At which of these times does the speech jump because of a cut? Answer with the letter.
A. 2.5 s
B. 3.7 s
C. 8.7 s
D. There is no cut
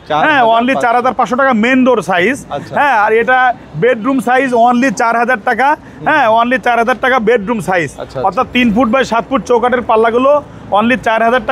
D